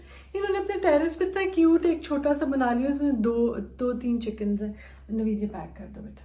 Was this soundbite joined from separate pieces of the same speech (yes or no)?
no